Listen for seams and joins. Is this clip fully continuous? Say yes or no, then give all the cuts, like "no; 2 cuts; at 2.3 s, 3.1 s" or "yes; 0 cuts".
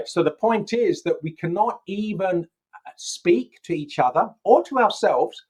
yes; 0 cuts